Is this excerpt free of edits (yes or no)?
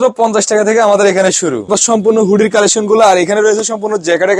no